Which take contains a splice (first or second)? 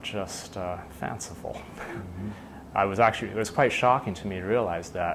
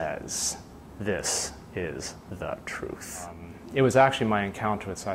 second